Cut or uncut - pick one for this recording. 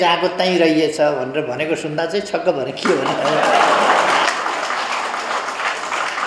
uncut